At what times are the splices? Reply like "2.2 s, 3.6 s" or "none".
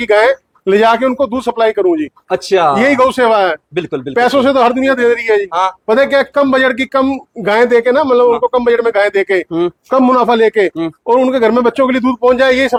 none